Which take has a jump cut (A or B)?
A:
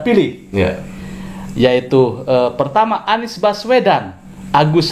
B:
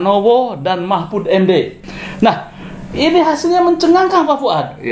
B